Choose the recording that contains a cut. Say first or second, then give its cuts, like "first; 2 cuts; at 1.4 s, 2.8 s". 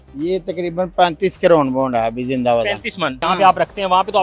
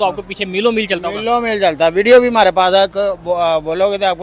first; 1 cut; at 3.2 s